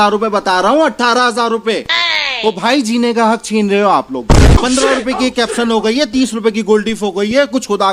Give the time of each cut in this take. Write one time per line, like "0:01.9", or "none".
0:04.6